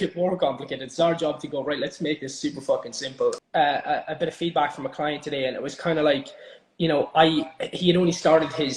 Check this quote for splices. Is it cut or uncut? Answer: cut